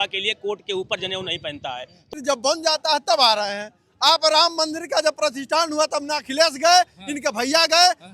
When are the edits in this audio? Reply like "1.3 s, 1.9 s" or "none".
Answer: 2.1 s